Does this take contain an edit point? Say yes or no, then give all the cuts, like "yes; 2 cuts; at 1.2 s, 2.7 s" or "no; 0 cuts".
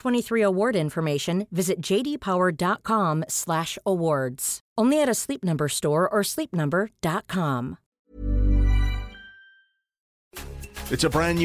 yes; 1 cut; at 7.9 s